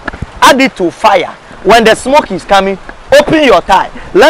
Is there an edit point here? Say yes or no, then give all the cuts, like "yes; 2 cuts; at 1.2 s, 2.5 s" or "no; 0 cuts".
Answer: no; 0 cuts